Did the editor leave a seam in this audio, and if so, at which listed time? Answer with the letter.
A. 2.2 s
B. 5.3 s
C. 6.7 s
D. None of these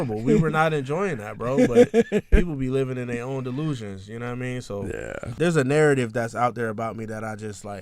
B